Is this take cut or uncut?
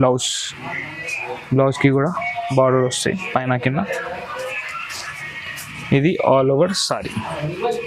uncut